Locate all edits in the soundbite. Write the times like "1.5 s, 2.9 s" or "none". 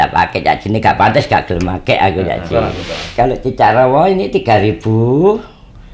2.5 s